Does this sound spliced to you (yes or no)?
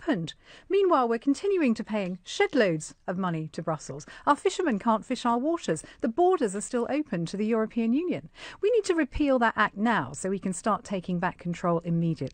yes